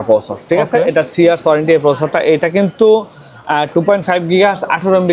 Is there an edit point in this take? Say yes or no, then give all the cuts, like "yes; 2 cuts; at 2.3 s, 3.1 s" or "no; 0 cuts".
no; 0 cuts